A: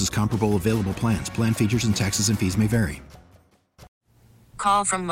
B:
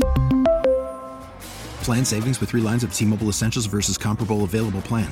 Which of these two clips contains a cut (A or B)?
A